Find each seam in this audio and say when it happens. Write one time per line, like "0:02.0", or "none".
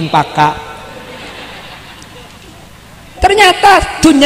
0:02.7